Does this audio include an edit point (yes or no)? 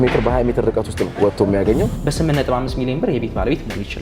yes